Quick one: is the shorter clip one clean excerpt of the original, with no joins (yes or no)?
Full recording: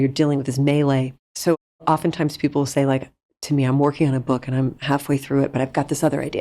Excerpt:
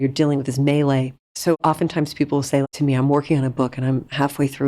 no